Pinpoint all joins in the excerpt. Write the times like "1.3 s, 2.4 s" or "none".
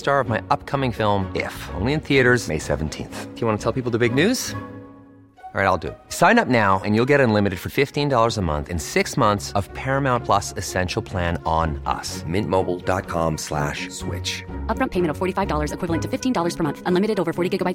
none